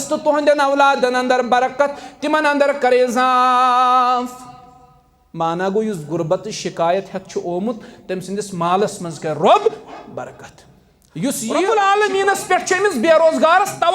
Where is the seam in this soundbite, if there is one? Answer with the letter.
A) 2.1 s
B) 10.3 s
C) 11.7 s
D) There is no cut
C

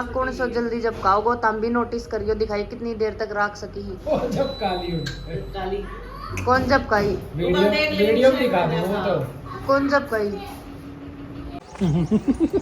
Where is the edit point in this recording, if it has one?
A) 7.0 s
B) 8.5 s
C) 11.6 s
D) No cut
C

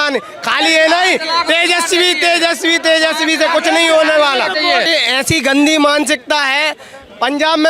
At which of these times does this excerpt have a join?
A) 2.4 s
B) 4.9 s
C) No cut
B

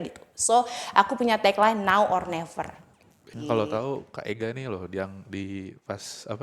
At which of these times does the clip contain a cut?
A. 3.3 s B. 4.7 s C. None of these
A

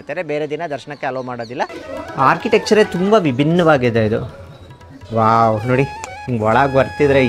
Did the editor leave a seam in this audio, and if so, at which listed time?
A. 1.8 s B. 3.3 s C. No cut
A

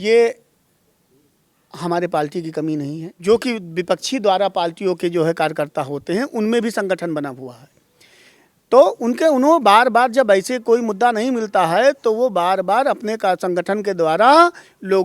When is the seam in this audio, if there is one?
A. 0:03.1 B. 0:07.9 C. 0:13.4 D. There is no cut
A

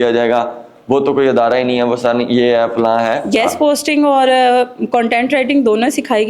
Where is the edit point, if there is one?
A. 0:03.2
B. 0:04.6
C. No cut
A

